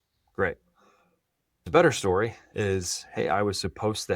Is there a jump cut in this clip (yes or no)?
yes